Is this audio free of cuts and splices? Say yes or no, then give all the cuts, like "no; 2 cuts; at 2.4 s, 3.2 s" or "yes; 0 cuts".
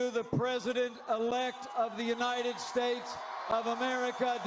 yes; 0 cuts